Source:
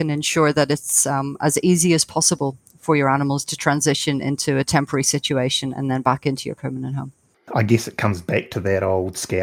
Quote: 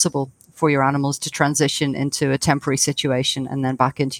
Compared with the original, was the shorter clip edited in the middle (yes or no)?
no